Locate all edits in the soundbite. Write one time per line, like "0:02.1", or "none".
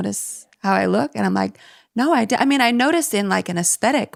none